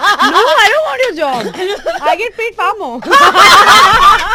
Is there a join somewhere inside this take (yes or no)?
no